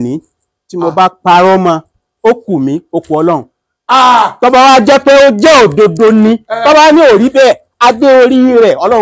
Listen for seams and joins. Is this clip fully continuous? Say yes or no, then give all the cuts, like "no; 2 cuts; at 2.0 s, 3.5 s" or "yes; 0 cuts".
yes; 0 cuts